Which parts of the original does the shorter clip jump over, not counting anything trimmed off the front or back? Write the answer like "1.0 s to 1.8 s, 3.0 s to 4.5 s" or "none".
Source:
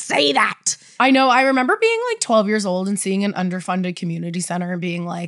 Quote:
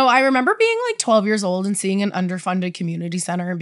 none